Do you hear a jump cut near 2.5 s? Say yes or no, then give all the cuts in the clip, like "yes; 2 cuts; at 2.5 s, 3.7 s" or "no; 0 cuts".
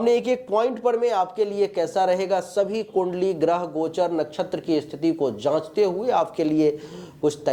no; 0 cuts